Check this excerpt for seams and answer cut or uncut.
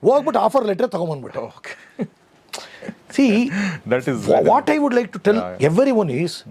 uncut